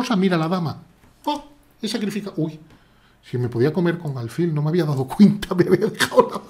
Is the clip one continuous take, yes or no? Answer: yes